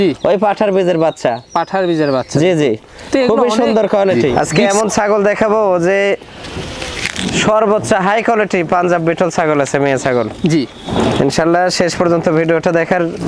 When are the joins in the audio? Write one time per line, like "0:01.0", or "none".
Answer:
0:04.2